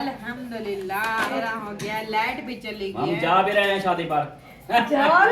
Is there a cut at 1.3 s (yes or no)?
yes